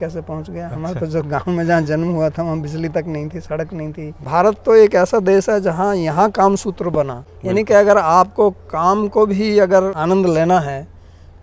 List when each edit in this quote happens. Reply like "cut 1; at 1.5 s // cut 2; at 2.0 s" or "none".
cut 1; at 4.2 s // cut 2; at 7.2 s // cut 3; at 10.0 s